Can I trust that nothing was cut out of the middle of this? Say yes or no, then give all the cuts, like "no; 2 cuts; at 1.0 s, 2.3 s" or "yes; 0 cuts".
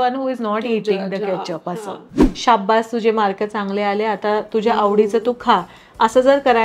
no; 1 cut; at 2.1 s